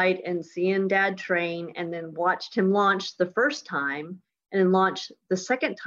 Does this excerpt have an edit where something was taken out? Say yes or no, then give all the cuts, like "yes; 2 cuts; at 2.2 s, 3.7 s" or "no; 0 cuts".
no; 0 cuts